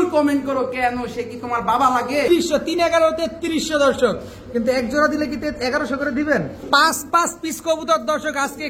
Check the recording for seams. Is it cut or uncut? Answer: cut